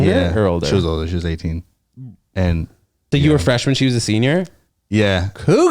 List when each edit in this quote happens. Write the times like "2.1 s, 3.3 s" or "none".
3.1 s